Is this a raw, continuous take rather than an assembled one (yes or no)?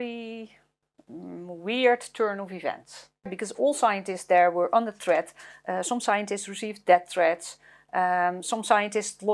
no